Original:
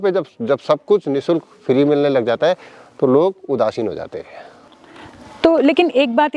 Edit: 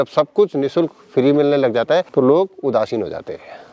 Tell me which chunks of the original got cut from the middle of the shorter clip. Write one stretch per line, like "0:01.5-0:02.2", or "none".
0:02.6-0:02.9